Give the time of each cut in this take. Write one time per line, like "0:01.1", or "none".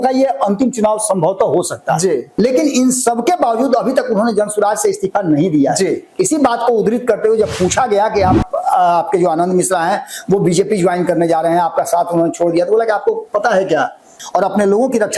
0:02.3
0:14.2